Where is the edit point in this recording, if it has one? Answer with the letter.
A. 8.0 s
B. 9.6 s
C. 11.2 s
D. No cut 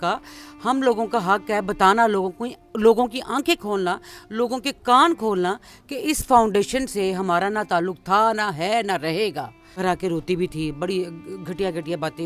B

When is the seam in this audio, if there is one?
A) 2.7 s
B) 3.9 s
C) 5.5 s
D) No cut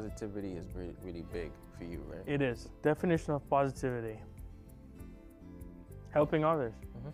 A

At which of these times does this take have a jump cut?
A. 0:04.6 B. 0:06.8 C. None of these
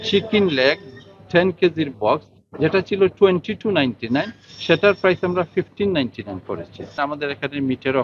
B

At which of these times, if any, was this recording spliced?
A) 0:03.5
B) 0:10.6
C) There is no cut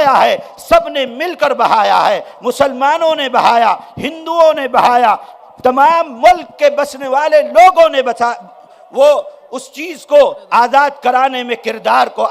C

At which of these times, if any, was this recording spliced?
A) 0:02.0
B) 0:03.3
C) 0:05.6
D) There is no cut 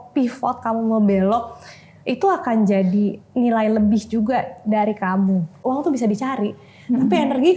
C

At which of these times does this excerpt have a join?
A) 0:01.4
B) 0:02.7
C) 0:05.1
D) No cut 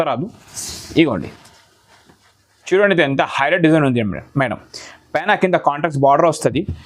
B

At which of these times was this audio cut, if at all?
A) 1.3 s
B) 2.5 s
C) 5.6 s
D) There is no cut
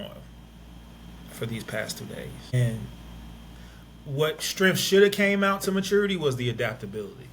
B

